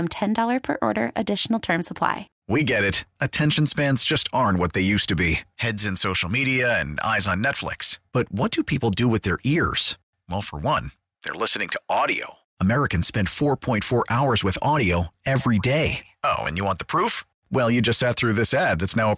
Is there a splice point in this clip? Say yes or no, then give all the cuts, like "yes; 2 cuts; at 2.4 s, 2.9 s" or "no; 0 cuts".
yes; 1 cut; at 2.3 s